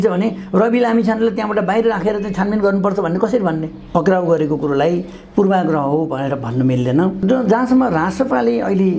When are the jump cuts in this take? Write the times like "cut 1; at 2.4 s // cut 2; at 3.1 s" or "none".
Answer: cut 1; at 3.8 s // cut 2; at 7.2 s